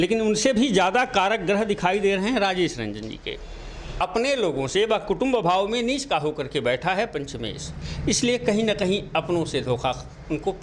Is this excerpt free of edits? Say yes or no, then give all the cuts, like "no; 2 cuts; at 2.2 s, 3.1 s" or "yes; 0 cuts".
no; 1 cut; at 4.0 s